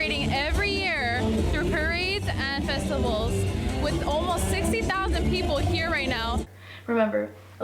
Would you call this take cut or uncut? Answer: cut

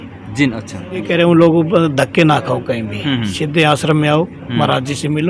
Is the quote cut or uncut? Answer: cut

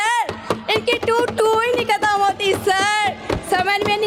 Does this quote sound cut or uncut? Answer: uncut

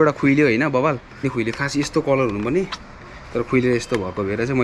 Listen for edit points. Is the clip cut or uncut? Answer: uncut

